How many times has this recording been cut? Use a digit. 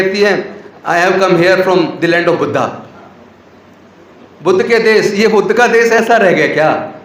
0